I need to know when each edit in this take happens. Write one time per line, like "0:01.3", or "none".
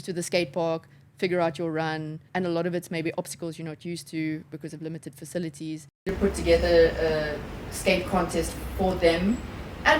0:02.2
0:05.9